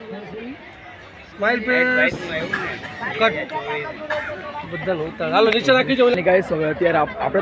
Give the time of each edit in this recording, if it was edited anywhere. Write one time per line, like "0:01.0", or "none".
0:06.1